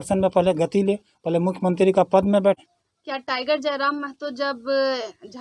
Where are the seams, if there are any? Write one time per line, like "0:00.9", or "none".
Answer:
0:02.7